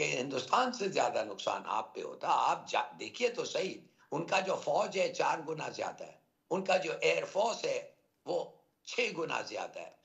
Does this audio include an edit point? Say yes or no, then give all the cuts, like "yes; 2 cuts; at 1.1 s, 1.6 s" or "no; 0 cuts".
no; 0 cuts